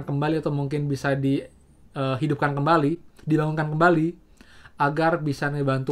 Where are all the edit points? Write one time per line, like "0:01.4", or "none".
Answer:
none